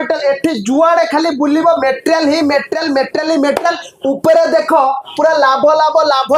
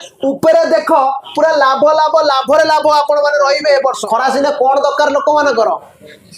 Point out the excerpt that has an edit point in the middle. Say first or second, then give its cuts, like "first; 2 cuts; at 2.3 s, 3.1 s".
second; 1 cut; at 4.0 s